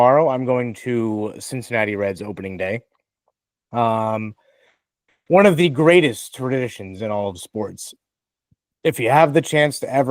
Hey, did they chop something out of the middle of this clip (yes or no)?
no